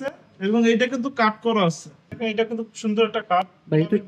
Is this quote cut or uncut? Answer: cut